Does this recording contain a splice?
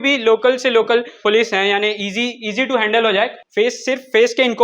yes; 2 cuts; at 1.2 s, 3.4 s

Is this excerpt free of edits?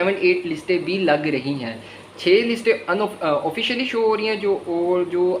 yes; 0 cuts

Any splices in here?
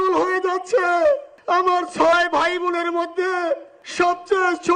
yes; 2 cuts; at 1.3 s, 3.8 s

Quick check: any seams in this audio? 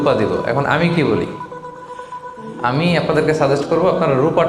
no; 0 cuts

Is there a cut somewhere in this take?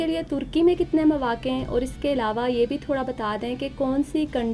no; 0 cuts

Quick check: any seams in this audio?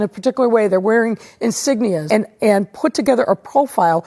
yes; 1 cut; at 2.0 s

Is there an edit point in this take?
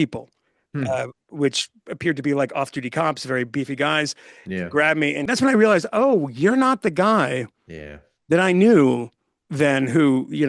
yes; 1 cut; at 5.3 s

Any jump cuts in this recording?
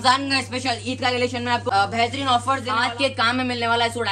yes; 2 cuts; at 1.6 s, 2.8 s

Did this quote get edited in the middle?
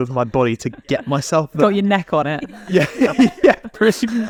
no; 0 cuts

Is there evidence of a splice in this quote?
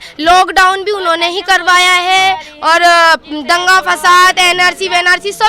no; 0 cuts

